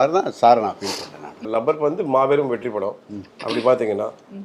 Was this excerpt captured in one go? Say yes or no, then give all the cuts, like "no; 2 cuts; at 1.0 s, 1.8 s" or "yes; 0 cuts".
no; 1 cut; at 1.5 s